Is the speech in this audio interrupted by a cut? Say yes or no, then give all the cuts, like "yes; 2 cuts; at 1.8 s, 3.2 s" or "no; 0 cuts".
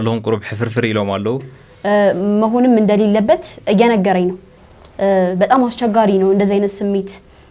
no; 0 cuts